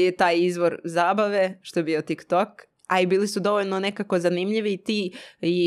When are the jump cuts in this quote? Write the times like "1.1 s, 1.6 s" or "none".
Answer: none

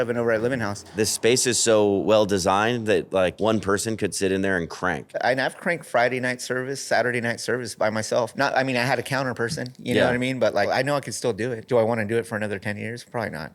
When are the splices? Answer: 0.9 s, 3.4 s, 5.2 s, 8.3 s, 11.0 s

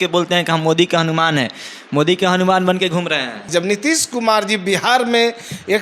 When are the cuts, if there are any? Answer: 3.5 s

